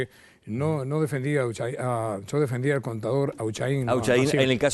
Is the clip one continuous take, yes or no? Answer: no